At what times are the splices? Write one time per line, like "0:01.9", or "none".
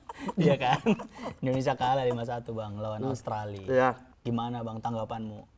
0:04.1